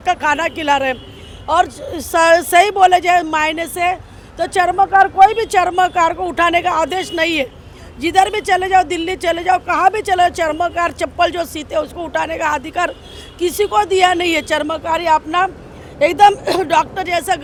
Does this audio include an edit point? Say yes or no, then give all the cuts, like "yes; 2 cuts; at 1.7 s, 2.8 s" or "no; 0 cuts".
no; 0 cuts